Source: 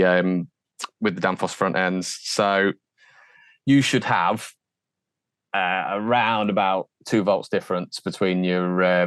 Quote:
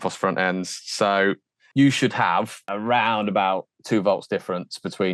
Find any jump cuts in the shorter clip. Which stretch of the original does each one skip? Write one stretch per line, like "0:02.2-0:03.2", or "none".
0:02.9-0:03.4
0:04.6-0:05.9